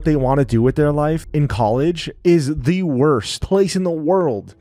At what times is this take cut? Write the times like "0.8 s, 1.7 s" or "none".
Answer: none